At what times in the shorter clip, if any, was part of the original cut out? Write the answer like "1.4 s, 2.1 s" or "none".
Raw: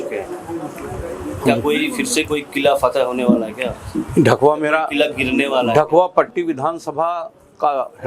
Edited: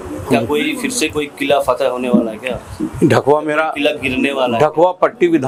none